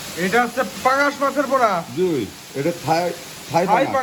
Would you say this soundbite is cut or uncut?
uncut